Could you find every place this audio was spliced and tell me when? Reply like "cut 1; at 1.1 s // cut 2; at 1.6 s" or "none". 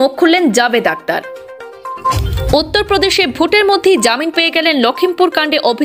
cut 1; at 2.0 s